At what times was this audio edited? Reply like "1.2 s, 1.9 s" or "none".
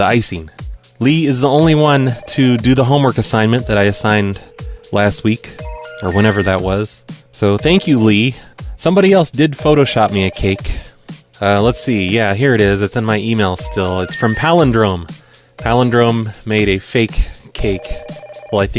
3.0 s